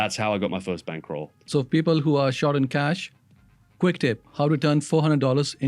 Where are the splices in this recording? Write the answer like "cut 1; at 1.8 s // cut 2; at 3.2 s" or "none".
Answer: cut 1; at 1.3 s